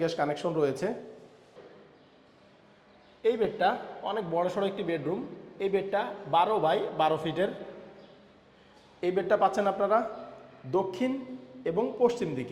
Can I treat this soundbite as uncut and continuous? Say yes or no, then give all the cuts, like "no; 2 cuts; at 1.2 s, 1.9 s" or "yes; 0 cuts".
no; 1 cut; at 1.6 s